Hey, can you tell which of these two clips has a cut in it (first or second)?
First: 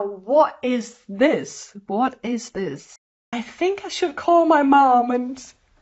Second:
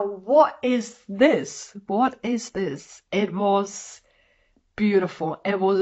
first